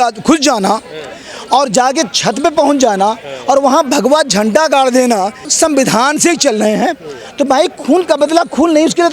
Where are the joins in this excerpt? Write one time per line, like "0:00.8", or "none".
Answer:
0:05.5